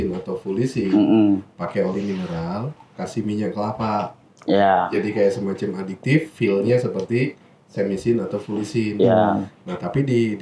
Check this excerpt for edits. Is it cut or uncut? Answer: uncut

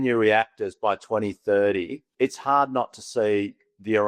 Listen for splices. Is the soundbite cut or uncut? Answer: cut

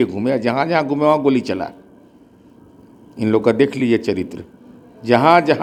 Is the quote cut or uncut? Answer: uncut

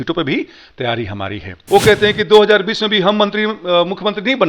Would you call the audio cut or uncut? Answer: cut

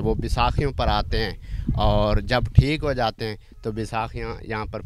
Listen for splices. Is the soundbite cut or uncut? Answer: uncut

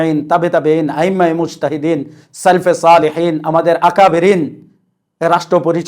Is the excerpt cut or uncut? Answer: uncut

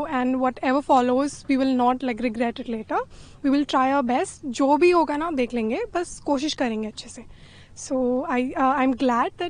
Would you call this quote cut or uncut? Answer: uncut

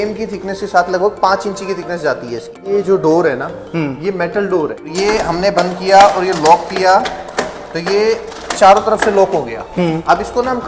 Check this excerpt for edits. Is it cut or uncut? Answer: cut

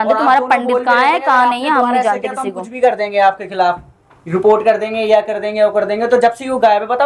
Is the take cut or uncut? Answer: uncut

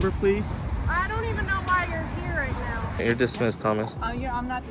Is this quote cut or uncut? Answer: cut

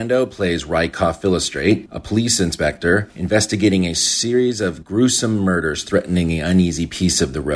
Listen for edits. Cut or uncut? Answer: cut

